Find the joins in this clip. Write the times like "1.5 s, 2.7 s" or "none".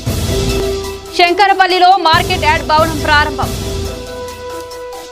0.9 s